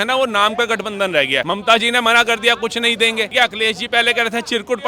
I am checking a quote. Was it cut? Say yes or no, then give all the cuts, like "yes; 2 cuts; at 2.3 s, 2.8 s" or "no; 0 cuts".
yes; 2 cuts; at 1.4 s, 3.3 s